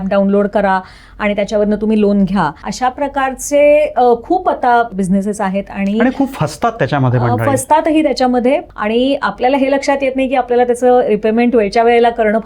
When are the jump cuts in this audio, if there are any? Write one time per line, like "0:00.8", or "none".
0:02.6
0:04.9
0:08.6